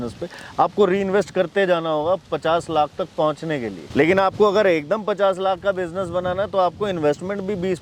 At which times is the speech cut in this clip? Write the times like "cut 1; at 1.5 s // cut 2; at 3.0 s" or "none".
none